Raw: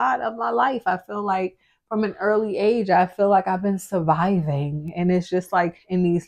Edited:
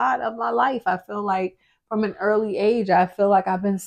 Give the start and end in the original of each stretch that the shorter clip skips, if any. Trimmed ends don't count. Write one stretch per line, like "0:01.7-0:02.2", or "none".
none